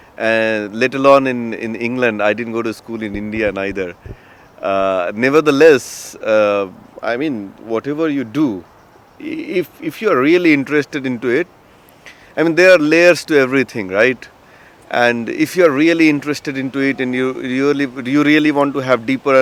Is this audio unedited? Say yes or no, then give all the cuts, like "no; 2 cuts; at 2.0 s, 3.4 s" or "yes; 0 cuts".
yes; 0 cuts